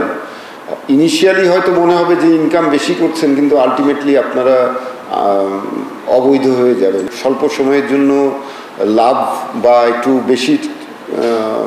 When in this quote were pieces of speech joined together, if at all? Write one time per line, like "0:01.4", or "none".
0:07.1